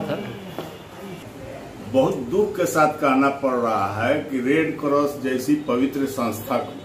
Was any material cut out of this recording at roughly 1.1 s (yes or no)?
yes